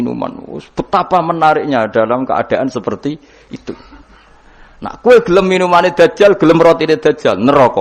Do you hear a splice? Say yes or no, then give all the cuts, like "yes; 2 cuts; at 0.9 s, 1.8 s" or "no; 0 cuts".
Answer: no; 0 cuts